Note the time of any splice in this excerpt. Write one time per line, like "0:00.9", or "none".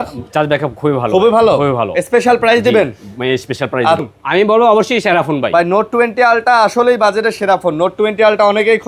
0:04.0